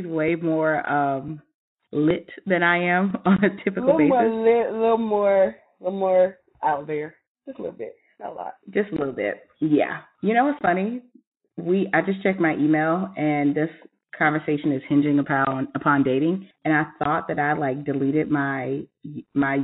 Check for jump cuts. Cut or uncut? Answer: cut